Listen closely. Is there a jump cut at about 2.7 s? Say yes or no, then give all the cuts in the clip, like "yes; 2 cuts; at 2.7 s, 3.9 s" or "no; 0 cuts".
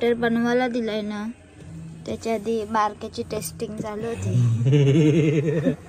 no; 0 cuts